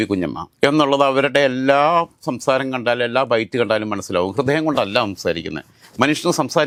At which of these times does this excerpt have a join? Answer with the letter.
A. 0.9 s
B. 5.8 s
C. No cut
C